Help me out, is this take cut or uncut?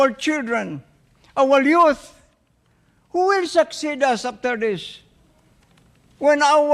uncut